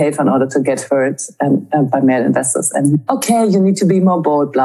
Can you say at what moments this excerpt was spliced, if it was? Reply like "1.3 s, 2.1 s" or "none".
1.9 s, 3.0 s